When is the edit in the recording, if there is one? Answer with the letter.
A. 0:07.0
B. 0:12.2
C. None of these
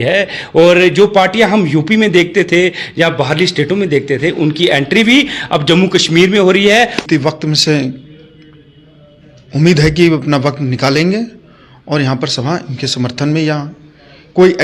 A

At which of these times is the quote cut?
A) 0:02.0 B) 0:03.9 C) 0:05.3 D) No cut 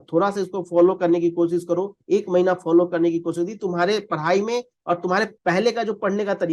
C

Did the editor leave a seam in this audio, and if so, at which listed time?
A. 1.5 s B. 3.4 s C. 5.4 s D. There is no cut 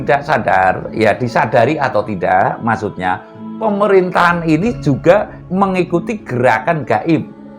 C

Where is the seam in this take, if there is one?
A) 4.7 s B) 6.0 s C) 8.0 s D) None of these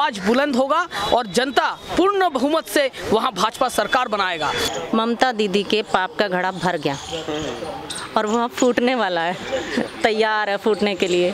A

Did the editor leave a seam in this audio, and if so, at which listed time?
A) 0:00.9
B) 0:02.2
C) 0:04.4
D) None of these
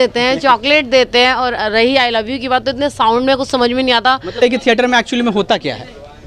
C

